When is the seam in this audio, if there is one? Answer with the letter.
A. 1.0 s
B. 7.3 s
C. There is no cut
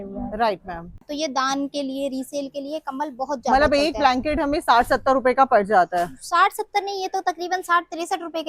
A